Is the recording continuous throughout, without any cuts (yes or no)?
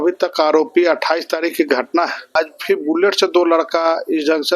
no